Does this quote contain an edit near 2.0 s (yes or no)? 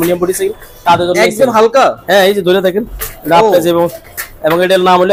no